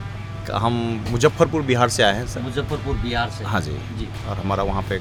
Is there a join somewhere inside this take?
no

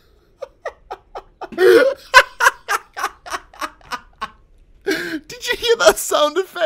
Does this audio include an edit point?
no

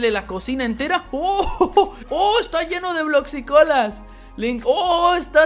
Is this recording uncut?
no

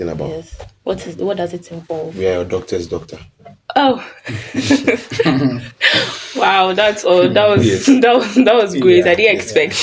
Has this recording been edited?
no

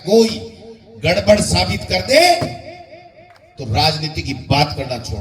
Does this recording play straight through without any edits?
yes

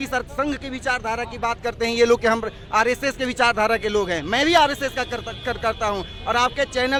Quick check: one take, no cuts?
yes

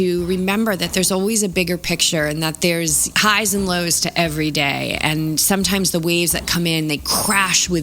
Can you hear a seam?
yes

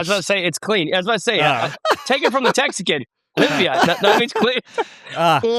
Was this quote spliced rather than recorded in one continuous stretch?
no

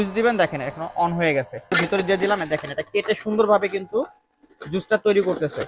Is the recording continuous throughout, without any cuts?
no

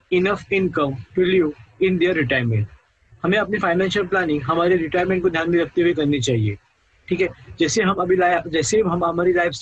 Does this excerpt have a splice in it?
yes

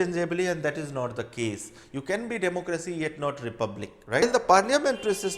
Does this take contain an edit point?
yes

